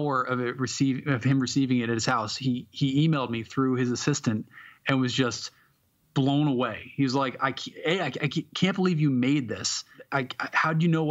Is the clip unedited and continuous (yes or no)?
no